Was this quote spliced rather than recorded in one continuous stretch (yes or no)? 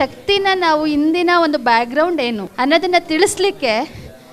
yes